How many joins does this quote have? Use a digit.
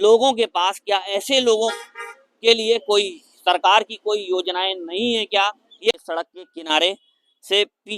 1